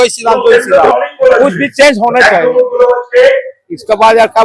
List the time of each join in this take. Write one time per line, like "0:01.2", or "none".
0:00.9